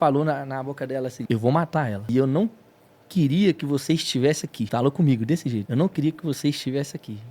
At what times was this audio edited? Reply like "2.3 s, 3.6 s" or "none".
1.2 s, 2.1 s, 4.7 s, 5.7 s